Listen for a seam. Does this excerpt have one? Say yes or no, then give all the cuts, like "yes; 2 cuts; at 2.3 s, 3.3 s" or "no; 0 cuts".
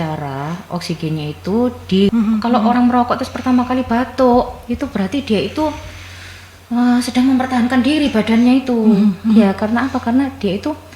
yes; 1 cut; at 2.1 s